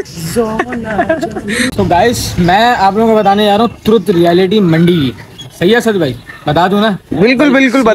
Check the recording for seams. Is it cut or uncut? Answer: cut